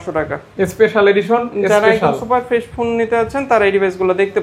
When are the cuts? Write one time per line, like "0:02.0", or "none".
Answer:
none